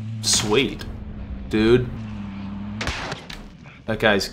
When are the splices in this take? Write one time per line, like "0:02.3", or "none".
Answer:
0:01.9